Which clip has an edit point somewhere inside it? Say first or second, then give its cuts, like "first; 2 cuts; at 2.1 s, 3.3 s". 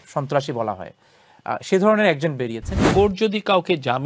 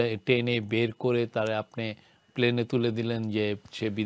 first; 1 cut; at 2.8 s